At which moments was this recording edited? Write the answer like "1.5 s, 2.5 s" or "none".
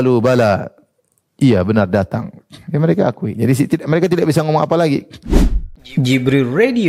5.2 s